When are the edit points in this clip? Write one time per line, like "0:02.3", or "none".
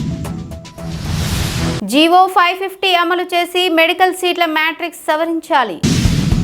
0:01.8

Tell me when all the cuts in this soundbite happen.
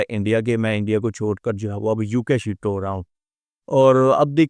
none

